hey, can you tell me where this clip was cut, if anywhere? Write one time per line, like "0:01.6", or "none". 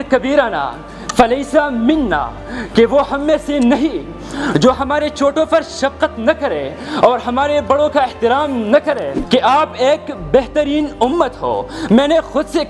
0:09.1